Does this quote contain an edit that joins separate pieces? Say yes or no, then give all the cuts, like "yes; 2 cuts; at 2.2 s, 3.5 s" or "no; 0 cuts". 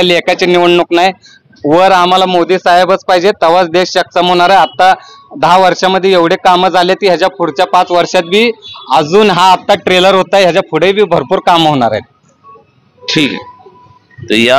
no; 0 cuts